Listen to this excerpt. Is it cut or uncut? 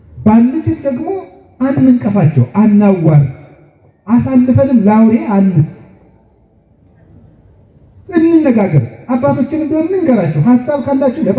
uncut